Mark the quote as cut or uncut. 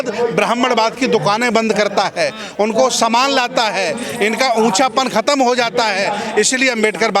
uncut